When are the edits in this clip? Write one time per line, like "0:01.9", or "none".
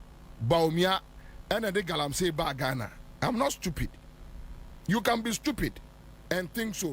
none